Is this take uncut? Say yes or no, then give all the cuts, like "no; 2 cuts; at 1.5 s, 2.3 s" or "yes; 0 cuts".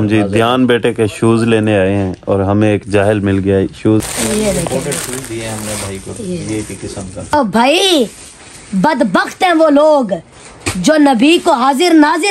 no; 2 cuts; at 4.0 s, 7.3 s